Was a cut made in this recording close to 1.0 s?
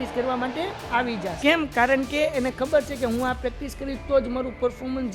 yes; 1 cut; at 1.0 s

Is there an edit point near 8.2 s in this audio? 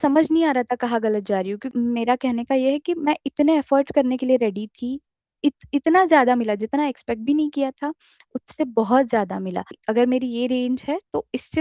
no; 3 cuts; at 1.7 s, 5.3 s, 9.8 s

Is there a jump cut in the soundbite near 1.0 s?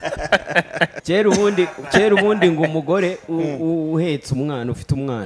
yes; 1 cut; at 1.0 s

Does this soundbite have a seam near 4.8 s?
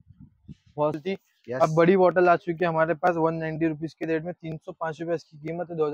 no; 1 cut; at 1.0 s

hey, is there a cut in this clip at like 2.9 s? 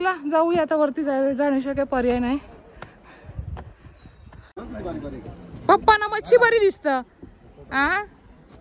no; 1 cut; at 4.6 s

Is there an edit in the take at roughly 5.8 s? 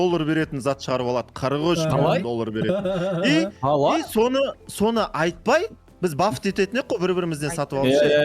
yes; 1 cut; at 5.8 s

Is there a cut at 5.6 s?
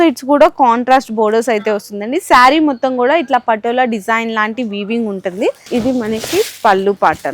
yes; 1 cut; at 5.6 s

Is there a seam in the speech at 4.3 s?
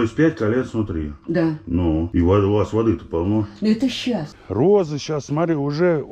yes; 2 cuts; at 2.1 s, 4.3 s

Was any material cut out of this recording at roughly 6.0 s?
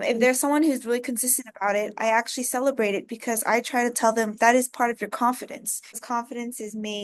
yes; 1 cut; at 6.0 s

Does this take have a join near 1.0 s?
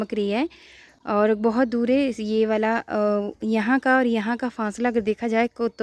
no; 0 cuts

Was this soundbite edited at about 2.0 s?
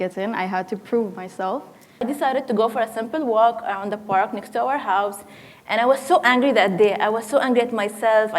yes; 1 cut; at 2.0 s

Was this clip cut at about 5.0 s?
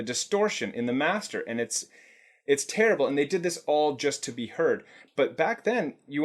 yes; 1 cut; at 5.0 s

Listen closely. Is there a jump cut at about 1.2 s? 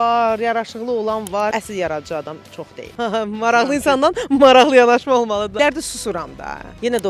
yes; 1 cut; at 1.2 s

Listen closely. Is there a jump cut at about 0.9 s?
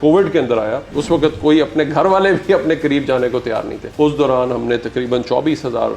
yes; 2 cuts; at 0.9 s, 3.8 s

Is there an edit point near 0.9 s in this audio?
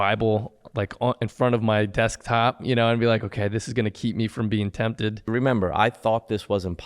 no; 1 cut; at 5.2 s

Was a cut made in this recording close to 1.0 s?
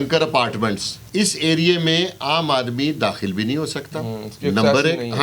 yes; 1 cut; at 1.0 s

